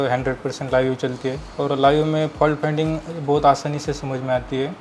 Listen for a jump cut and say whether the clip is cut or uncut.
cut